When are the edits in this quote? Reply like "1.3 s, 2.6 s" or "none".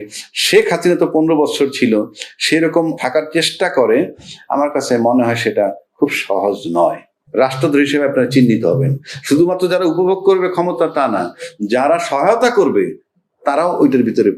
3.0 s, 7.1 s